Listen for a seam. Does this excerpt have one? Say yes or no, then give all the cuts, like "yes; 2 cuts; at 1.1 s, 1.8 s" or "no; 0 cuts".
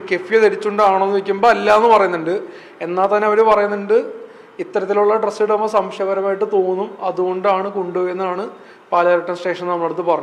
no; 0 cuts